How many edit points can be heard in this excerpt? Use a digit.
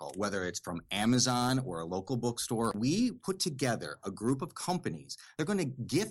2